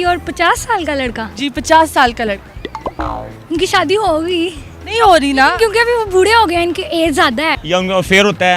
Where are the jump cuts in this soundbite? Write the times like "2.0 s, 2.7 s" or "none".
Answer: 7.6 s

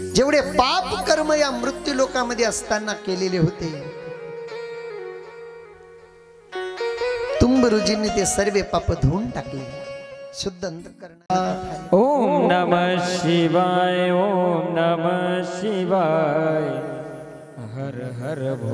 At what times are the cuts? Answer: 11.3 s

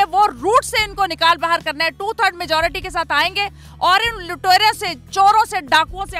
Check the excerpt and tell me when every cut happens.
none

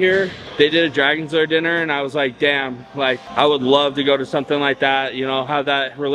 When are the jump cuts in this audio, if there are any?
none

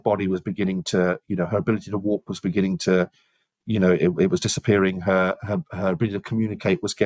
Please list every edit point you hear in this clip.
none

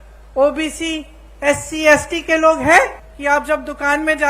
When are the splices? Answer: 3.1 s

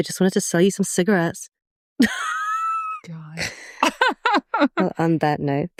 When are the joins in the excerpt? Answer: none

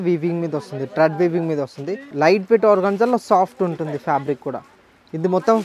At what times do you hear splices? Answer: 2.1 s

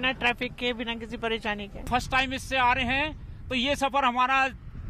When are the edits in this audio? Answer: 1.8 s

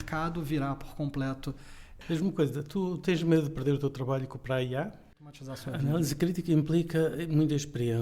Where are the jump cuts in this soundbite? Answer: 1.9 s, 5.3 s

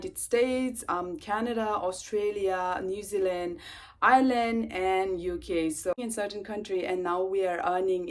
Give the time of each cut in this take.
6.0 s

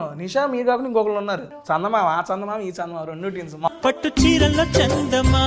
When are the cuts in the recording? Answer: 1.5 s, 3.7 s

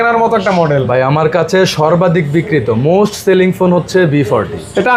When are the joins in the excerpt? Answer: none

